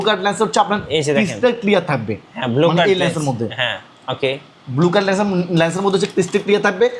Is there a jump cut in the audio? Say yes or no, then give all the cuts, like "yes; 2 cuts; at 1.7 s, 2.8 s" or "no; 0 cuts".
no; 0 cuts